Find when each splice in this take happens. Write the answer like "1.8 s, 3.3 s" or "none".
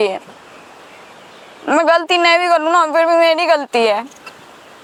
none